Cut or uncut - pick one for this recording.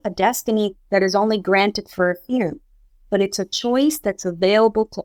uncut